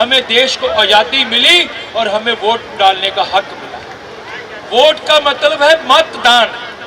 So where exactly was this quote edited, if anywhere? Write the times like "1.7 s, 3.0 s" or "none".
none